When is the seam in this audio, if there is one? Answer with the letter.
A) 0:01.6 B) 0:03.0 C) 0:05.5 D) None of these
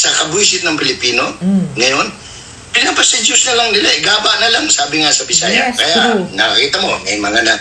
C